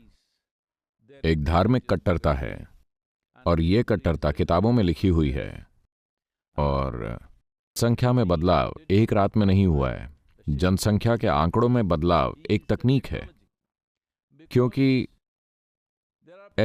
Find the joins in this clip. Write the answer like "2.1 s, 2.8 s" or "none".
7.8 s

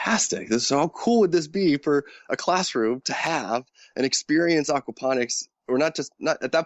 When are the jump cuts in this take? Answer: none

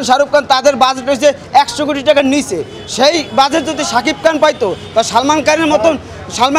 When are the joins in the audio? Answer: none

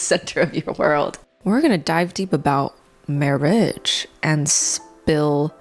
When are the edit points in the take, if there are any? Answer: 1.4 s

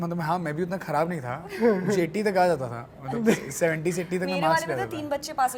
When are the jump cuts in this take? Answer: none

